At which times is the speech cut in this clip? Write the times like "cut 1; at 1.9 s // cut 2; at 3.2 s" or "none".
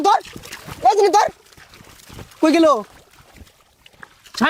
none